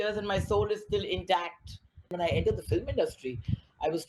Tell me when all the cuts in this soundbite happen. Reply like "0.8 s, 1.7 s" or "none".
2.1 s

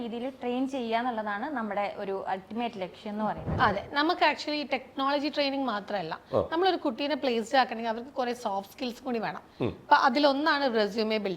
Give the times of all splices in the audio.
3.5 s

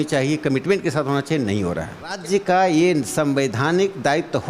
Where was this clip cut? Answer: 2.2 s

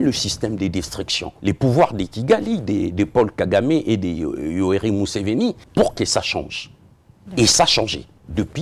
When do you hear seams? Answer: 1.2 s, 5.6 s

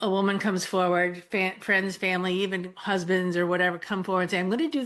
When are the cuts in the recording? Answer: none

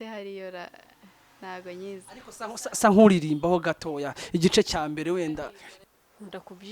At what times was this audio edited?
5.6 s

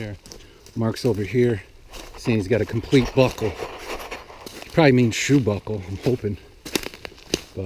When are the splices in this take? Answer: none

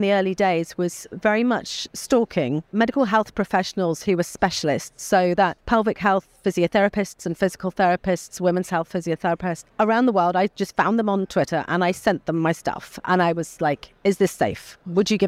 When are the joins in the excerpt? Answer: 2.7 s, 5.6 s, 9.7 s

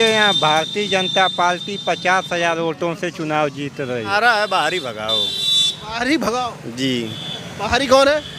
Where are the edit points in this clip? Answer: 4.1 s

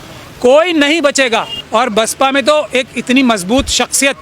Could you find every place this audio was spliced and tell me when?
1.6 s

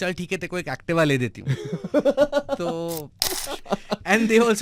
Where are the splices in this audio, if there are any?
3.3 s

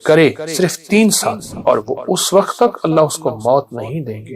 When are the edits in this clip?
1.5 s

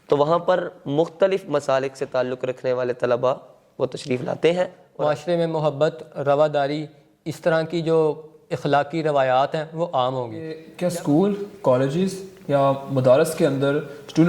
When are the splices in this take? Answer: 4.8 s, 10.7 s

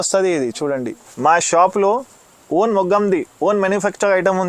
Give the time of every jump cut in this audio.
1.0 s

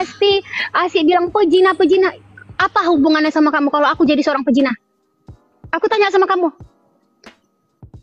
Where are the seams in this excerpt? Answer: 6.6 s

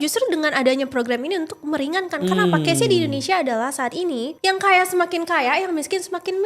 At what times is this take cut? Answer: 4.3 s

